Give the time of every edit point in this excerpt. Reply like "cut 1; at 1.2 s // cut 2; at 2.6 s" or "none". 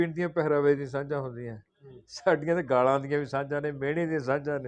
none